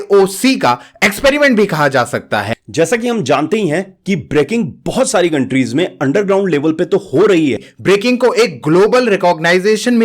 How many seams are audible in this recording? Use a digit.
2